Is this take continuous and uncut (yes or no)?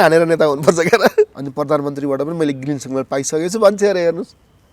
no